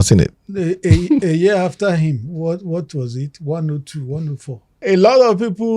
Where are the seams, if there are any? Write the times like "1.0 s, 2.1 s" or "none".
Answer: 4.8 s